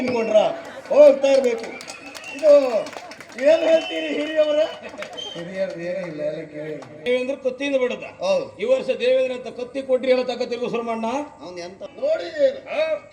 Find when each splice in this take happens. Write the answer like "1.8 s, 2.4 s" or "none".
6.9 s, 11.9 s